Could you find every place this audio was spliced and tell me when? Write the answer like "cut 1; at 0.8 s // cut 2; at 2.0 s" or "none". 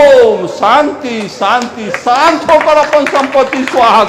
none